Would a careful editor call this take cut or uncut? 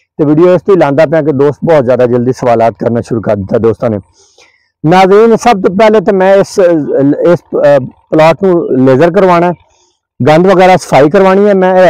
uncut